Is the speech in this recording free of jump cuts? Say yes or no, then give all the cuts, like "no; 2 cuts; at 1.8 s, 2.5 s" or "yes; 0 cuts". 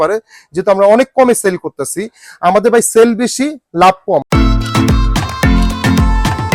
no; 1 cut; at 4.2 s